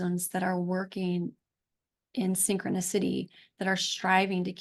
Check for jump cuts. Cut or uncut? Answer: uncut